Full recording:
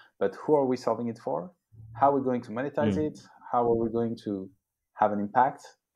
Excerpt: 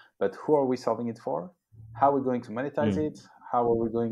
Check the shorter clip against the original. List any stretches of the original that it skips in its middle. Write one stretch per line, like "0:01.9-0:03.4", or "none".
none